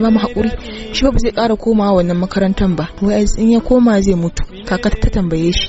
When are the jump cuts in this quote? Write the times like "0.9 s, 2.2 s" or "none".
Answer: 2.9 s, 4.5 s